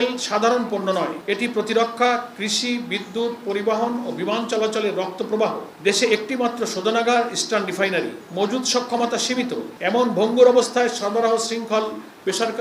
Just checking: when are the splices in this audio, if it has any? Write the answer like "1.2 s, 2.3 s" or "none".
1.2 s, 5.7 s, 8.2 s, 9.7 s